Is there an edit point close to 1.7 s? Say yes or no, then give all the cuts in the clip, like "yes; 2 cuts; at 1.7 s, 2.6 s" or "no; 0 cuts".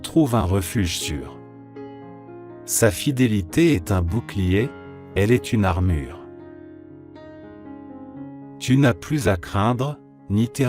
no; 2 cuts; at 6.4 s, 8.6 s